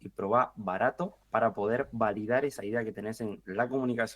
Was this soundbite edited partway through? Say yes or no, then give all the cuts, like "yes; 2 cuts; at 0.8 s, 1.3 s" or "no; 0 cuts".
yes; 1 cut; at 1.1 s